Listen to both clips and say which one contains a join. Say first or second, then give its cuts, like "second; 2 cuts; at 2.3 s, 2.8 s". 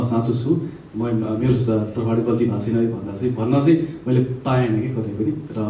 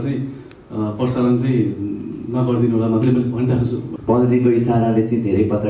second; 1 cut; at 3.9 s